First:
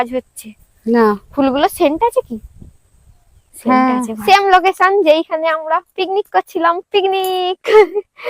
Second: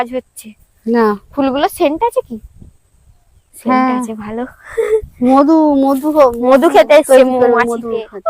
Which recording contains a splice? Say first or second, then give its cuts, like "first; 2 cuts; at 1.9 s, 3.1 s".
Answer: first; 1 cut; at 4.2 s